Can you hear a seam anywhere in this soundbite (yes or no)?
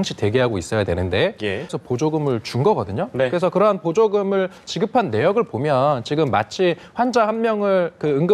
yes